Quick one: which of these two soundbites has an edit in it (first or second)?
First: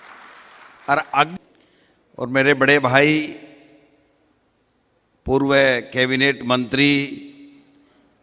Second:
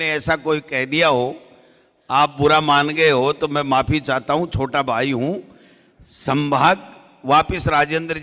first